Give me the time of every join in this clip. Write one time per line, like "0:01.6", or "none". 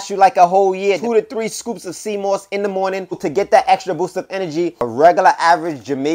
0:01.0
0:03.2
0:04.9